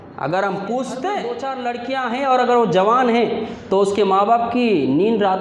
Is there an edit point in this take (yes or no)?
yes